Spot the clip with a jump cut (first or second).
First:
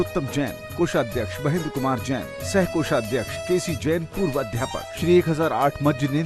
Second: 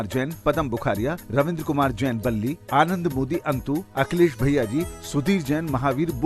first